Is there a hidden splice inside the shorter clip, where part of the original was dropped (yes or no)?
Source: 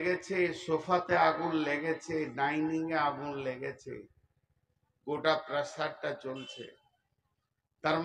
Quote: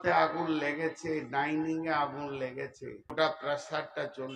yes